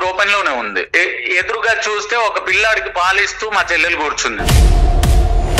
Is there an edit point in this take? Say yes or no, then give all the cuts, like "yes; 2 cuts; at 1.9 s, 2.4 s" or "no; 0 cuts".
yes; 1 cut; at 4.4 s